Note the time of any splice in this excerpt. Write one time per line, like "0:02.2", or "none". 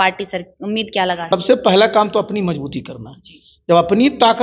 0:01.3

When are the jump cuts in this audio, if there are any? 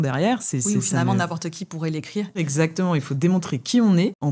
0:02.5

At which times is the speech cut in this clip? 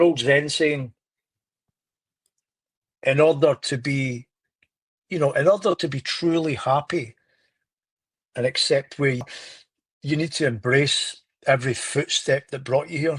0:09.2

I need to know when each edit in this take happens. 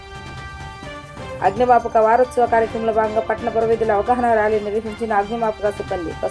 0:01.4

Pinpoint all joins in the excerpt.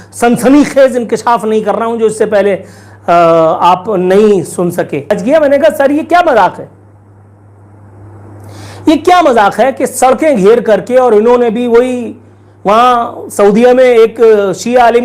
0:05.2

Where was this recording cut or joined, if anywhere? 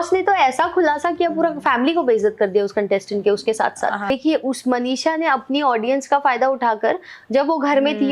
0:04.1

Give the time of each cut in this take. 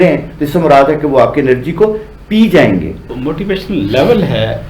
0:03.1

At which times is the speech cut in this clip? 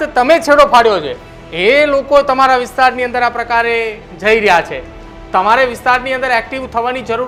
none

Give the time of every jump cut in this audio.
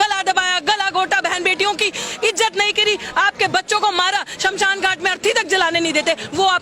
none

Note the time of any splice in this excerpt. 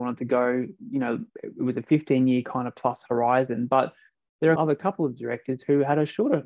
0:01.3
0:04.6

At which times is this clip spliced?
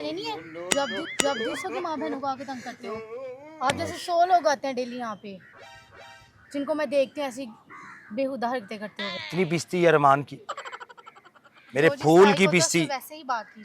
0:09.2

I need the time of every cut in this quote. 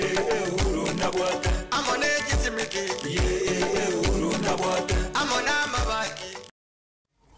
0:06.5

